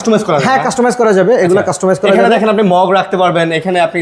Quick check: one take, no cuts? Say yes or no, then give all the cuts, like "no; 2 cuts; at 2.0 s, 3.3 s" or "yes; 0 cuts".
yes; 0 cuts